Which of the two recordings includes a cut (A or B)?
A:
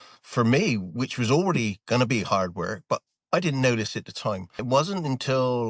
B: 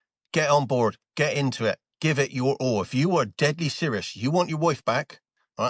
A